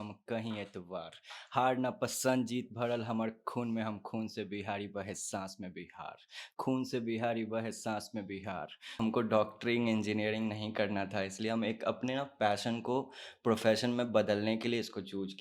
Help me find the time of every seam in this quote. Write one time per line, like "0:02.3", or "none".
0:08.9